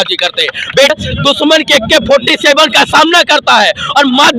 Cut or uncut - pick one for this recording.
cut